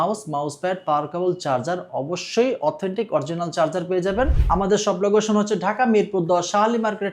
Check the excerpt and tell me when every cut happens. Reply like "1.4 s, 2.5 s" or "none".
4.4 s